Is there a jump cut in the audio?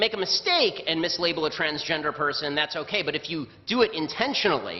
yes; 1 cut; at 2.3 s

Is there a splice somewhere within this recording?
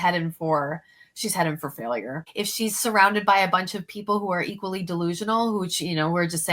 yes; 1 cut; at 2.2 s

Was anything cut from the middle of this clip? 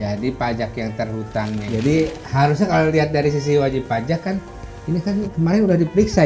yes; 1 cut; at 1.7 s

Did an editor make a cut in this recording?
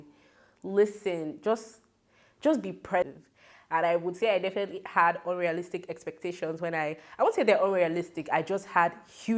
yes; 1 cut; at 3.1 s

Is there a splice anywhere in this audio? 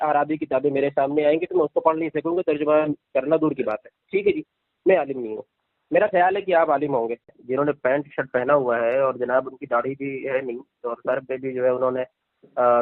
yes; 1 cut; at 7.4 s

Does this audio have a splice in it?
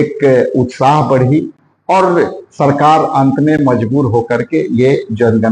no; 0 cuts

